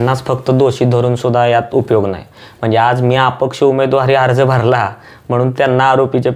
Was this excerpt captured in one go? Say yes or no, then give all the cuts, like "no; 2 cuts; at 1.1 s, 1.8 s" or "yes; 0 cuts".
yes; 0 cuts